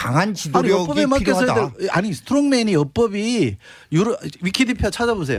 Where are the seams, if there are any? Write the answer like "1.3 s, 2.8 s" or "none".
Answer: 1.5 s